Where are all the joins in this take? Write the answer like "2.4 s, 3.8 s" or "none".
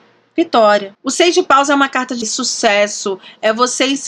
1.0 s, 2.3 s